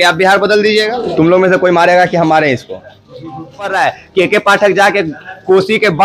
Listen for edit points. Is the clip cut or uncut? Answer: cut